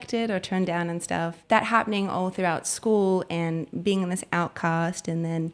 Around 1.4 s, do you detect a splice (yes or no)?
yes